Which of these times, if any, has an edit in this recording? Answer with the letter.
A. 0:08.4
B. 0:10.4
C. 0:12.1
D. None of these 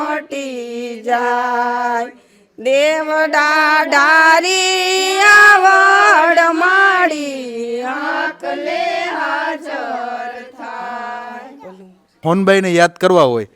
C